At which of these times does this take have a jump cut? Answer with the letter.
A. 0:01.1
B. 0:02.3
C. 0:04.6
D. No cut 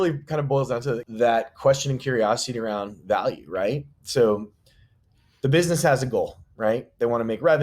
A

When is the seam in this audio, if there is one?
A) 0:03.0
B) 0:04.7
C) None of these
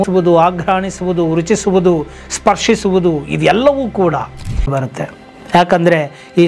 B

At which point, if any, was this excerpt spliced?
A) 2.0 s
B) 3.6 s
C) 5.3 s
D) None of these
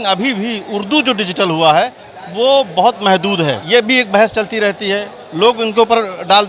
B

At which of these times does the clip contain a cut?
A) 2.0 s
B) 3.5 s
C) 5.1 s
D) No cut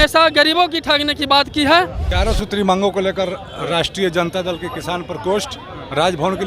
A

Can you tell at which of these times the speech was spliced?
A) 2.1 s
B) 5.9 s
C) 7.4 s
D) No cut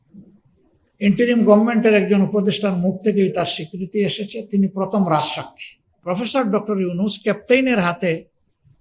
B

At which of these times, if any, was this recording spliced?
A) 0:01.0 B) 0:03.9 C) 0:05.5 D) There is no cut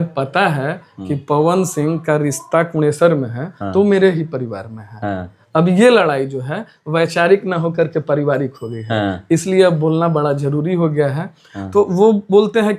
D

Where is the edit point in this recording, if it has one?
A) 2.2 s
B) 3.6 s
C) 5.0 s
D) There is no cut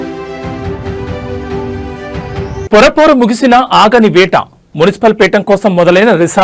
A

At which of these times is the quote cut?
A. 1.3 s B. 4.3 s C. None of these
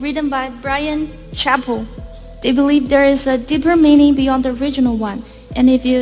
B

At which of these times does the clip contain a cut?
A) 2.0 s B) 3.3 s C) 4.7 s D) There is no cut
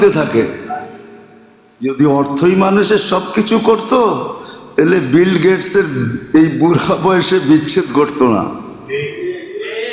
A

